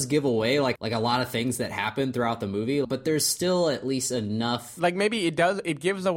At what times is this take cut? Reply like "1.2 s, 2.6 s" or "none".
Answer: 0.8 s, 2.9 s, 4.7 s